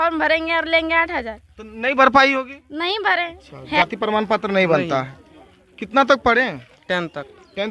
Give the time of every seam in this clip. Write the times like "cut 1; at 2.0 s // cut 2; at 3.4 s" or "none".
cut 1; at 3.8 s